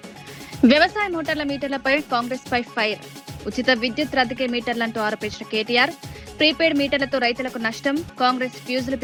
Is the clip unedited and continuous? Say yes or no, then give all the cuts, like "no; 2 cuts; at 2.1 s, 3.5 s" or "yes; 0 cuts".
yes; 0 cuts